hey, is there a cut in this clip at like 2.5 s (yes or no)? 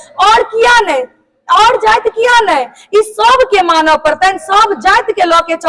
no